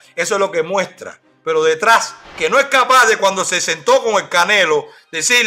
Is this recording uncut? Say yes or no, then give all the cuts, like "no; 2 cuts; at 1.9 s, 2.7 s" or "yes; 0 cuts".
no; 1 cut; at 2.2 s